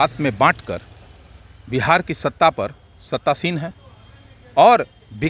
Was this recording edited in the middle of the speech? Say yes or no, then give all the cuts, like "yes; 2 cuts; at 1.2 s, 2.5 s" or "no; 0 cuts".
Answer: no; 0 cuts